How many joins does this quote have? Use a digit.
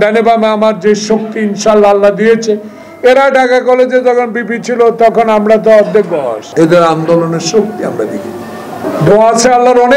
2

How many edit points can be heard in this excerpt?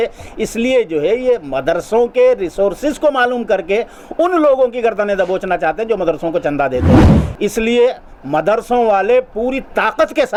0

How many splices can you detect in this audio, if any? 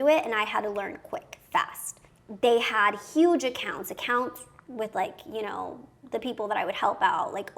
1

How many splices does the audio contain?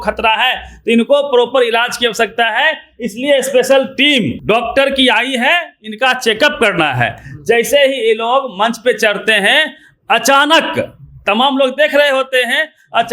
1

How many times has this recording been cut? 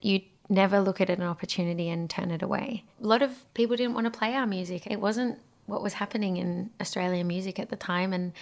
2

